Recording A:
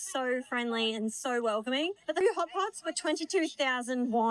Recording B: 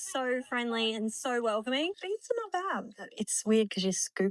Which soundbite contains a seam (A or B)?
B